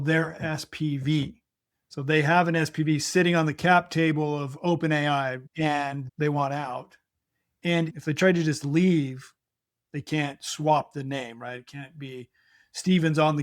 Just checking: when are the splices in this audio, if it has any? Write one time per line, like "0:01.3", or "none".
0:05.4
0:07.9